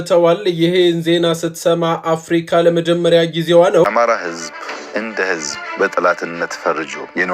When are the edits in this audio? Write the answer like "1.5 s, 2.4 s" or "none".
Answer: 3.8 s